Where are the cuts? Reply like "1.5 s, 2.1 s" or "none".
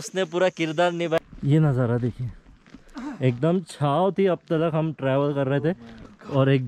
1.2 s